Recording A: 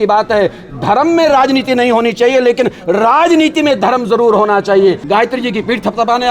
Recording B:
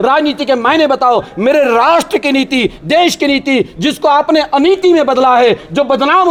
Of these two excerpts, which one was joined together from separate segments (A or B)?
A